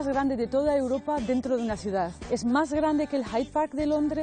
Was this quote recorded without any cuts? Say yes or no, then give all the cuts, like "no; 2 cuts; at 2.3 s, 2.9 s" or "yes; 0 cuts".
no; 1 cut; at 2.2 s